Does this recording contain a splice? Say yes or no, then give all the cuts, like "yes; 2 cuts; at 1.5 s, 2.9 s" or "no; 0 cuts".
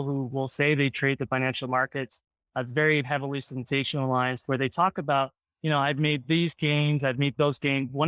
no; 0 cuts